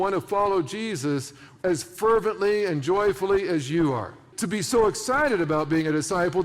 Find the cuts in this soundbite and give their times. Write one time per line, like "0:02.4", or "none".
0:04.3